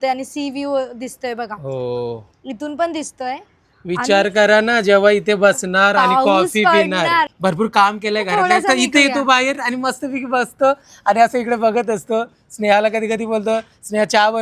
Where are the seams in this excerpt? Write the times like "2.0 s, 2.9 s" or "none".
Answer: 7.3 s